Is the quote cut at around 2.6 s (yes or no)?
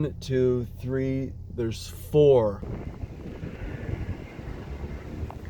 yes